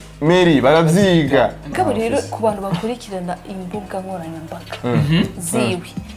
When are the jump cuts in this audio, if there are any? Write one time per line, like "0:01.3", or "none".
0:01.7